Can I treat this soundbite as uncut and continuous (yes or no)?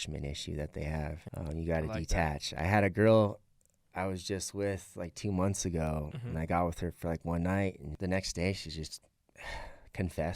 no